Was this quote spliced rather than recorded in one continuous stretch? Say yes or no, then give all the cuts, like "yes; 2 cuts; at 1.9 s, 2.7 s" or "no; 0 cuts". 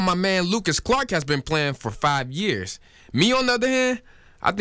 no; 0 cuts